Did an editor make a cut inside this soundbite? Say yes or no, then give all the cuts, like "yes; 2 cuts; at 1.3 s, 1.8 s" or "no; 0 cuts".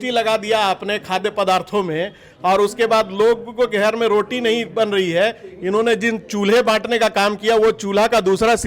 no; 0 cuts